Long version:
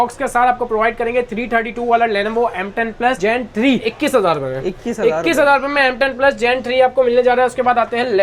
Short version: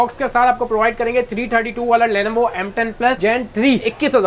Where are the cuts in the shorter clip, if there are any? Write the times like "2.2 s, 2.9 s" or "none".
none